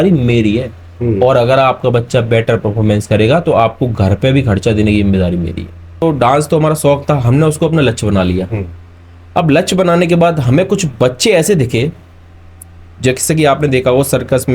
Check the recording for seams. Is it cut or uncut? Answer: cut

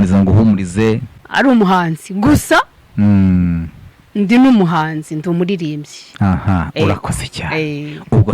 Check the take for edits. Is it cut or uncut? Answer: cut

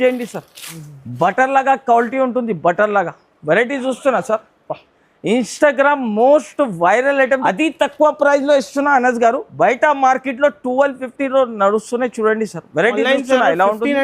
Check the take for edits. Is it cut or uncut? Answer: cut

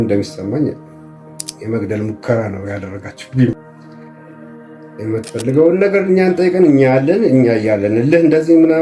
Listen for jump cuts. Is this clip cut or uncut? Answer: cut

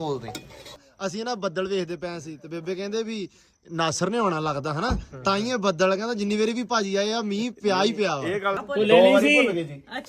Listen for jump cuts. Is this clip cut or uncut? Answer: cut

